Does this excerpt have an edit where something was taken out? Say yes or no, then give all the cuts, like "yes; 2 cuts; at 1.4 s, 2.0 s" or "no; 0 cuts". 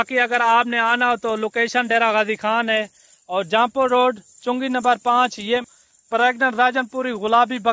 yes; 1 cut; at 5.6 s